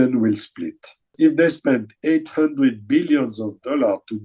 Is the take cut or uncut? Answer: cut